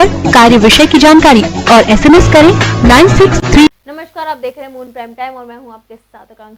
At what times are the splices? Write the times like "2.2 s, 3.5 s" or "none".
3.8 s